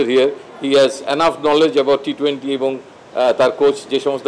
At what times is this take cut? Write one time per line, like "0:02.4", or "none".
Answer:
none